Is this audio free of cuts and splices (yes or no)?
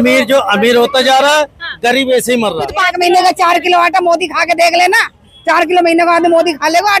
no